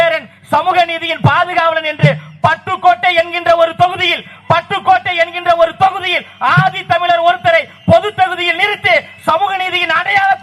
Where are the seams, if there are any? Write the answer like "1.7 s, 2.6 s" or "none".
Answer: none